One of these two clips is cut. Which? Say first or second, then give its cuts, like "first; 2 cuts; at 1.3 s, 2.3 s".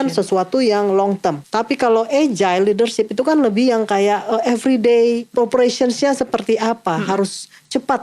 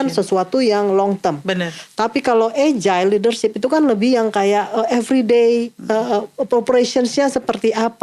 first; 2 cuts; at 1.4 s, 5.3 s